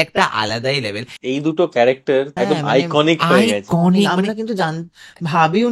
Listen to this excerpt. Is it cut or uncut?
cut